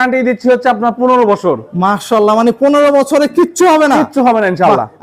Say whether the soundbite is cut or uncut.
uncut